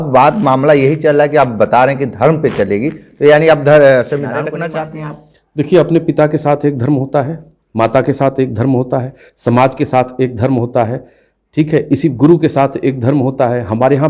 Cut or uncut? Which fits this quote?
cut